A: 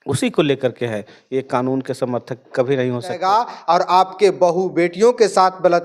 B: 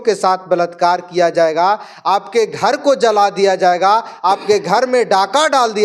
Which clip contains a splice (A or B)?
A